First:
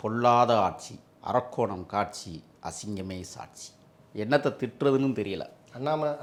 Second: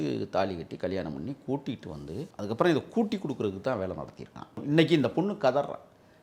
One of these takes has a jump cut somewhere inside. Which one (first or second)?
second